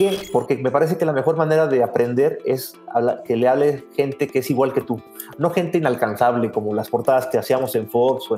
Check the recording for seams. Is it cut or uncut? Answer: uncut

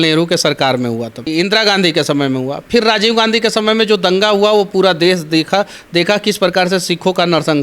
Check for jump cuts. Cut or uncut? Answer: cut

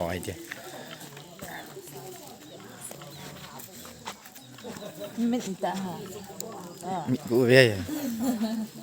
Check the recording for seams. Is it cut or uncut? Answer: uncut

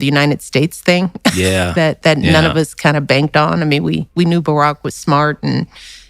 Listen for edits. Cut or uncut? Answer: cut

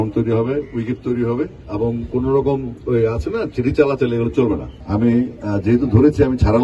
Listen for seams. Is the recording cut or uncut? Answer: cut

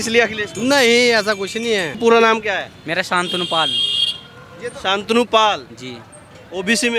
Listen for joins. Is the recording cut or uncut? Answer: cut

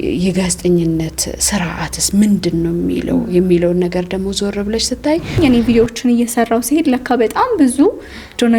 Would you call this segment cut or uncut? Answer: cut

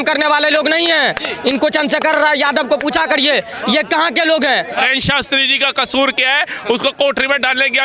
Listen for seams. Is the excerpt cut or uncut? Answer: cut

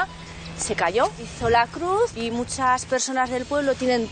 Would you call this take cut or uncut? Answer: cut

